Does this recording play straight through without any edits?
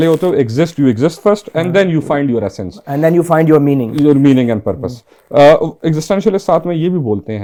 yes; 0 cuts

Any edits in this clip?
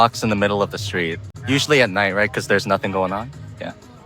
no; 0 cuts

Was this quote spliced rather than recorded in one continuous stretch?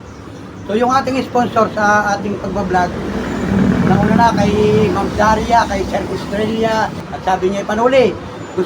yes; 1 cut; at 7.1 s

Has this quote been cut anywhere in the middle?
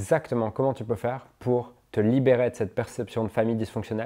no; 0 cuts

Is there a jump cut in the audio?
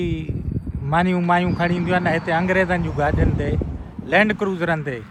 no; 0 cuts

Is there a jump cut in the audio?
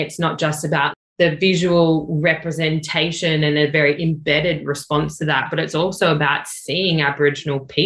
yes; 1 cut; at 1.0 s

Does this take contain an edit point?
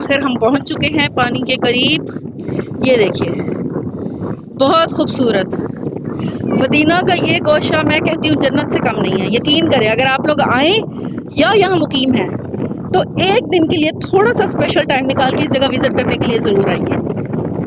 no; 0 cuts

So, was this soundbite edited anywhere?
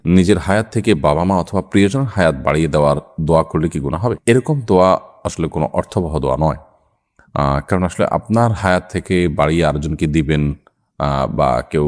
no; 0 cuts

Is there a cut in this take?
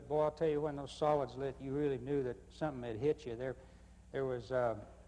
no; 0 cuts

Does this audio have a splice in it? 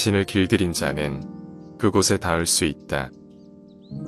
yes; 1 cut; at 3.1 s

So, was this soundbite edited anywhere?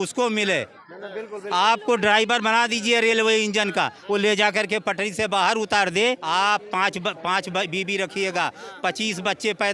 yes; 1 cut; at 6.2 s

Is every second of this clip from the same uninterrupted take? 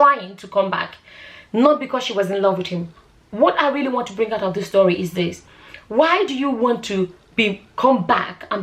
no; 1 cut; at 3.0 s

